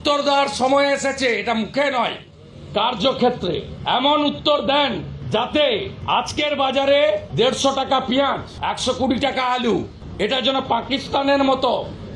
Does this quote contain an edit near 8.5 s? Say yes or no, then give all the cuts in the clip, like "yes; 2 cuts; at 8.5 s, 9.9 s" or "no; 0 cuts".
yes; 6 cuts; at 3.7 s, 5.1 s, 5.9 s, 7.3 s, 8.5 s, 10.0 s